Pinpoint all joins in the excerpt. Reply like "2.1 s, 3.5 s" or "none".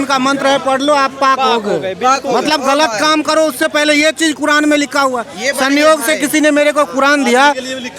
none